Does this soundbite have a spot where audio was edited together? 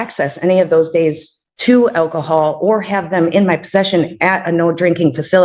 no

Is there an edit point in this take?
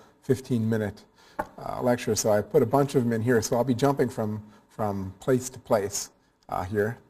yes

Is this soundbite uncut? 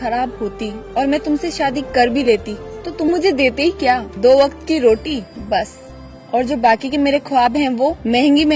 yes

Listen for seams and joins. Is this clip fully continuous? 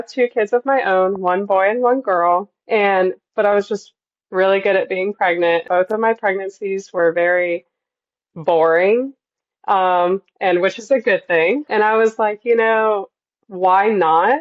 no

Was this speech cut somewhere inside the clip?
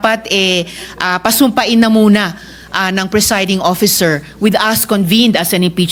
no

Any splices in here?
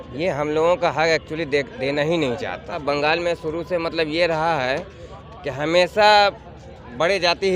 yes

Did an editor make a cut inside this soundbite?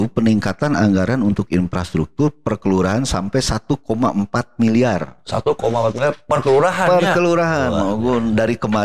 no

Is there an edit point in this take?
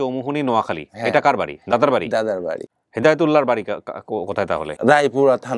yes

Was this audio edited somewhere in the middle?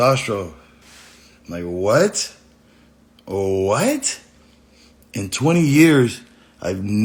no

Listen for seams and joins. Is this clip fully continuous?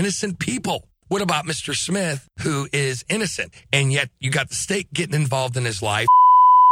no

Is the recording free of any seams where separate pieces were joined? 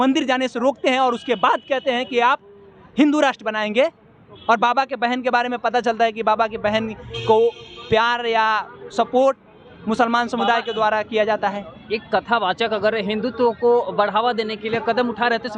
yes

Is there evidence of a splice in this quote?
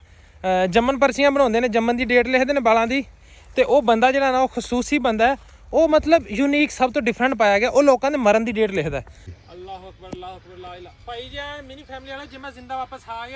yes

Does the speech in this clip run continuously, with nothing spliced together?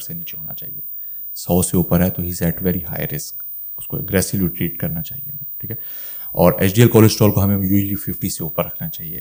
yes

